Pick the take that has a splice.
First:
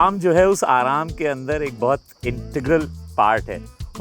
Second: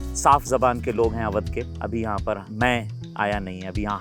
second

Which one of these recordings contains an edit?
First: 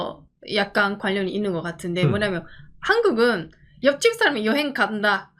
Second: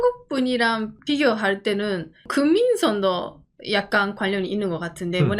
second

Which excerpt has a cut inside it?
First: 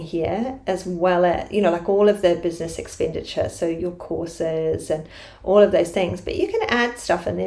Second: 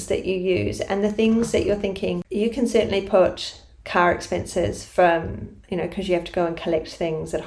second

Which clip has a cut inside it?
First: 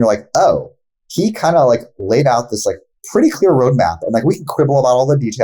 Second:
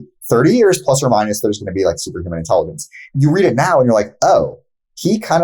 second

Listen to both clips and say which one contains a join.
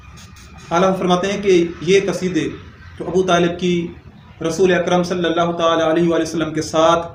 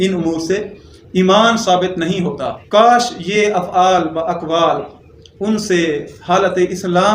second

